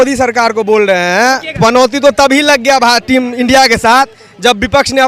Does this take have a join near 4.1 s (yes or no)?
no